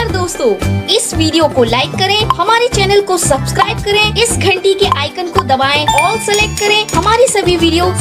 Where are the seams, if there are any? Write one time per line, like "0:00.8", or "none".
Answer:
none